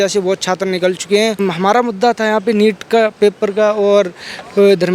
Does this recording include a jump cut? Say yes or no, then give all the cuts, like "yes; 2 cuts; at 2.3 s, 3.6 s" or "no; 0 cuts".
yes; 1 cut; at 1.4 s